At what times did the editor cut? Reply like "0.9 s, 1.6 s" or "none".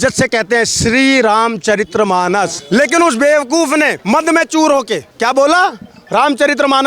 2.6 s, 4.0 s, 5.0 s